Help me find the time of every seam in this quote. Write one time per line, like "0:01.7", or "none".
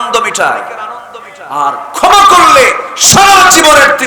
none